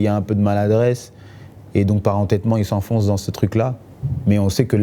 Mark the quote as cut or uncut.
uncut